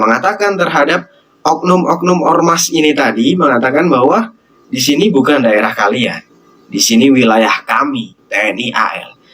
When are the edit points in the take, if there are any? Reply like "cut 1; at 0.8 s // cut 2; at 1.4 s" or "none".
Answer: none